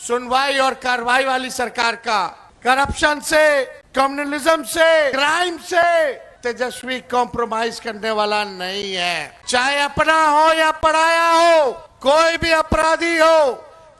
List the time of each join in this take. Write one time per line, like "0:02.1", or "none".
0:02.5
0:03.8
0:05.1
0:06.3
0:09.3
0:11.9